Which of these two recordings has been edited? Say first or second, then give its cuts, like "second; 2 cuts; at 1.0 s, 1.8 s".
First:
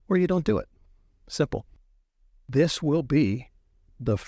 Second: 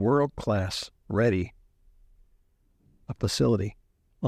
first; 1 cut; at 2.0 s